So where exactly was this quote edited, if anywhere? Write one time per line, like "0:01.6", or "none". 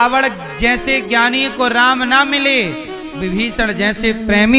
none